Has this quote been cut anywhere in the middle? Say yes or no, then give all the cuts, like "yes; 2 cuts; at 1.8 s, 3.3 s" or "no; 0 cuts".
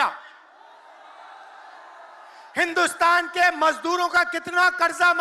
no; 0 cuts